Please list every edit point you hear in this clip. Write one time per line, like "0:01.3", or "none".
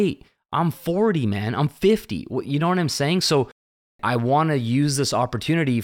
0:03.5